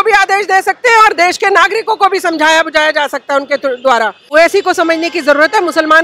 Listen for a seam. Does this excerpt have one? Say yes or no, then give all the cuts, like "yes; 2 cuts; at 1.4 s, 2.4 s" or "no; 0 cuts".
yes; 1 cut; at 4.3 s